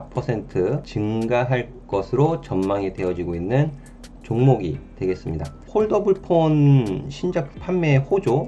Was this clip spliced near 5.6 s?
yes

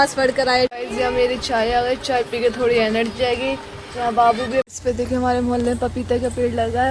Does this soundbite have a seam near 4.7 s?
yes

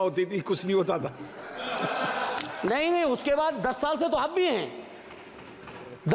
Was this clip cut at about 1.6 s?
no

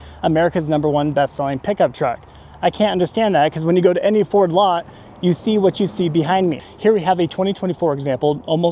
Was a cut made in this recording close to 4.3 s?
no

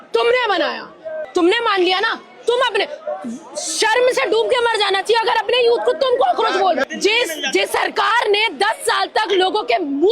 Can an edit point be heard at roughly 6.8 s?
yes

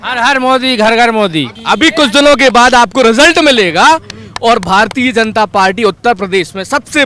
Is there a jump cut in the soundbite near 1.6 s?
yes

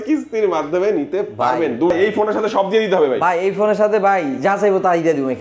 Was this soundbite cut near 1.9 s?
yes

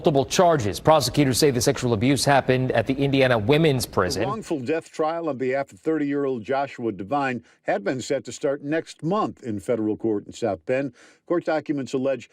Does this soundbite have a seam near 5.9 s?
no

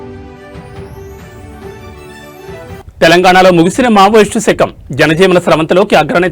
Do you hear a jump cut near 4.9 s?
no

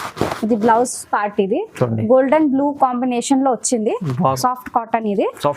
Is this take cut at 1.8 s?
no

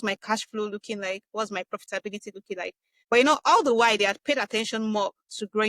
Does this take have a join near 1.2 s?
no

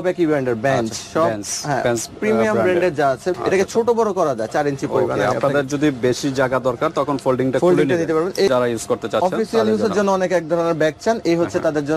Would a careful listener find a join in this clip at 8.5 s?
yes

